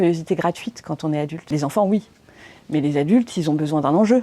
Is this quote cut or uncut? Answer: cut